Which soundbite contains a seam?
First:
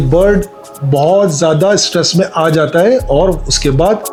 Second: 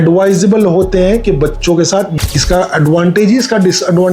second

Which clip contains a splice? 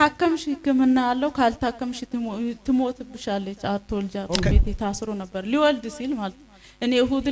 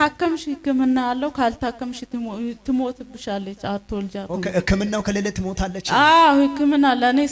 first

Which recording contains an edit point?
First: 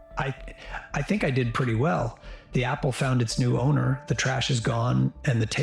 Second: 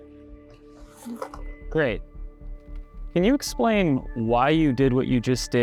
first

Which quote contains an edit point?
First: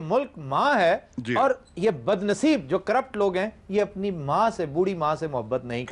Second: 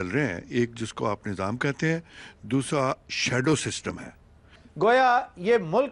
second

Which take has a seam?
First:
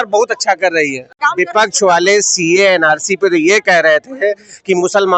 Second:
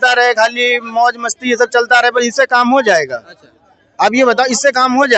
first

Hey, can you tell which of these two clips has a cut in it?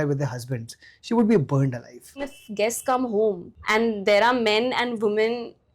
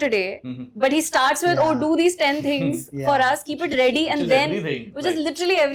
first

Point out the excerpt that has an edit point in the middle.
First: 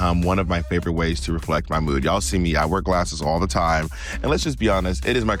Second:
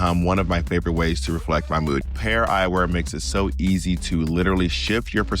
second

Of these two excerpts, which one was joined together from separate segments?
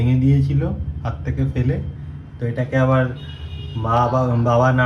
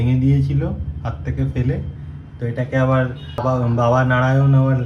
second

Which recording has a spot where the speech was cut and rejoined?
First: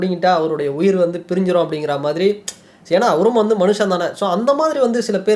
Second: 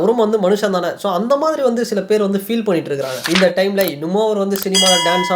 second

